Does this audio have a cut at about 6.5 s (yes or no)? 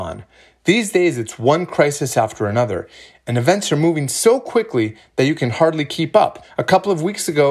yes